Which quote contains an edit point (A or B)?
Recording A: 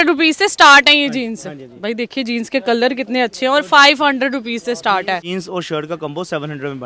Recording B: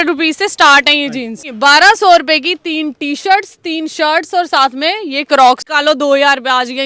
B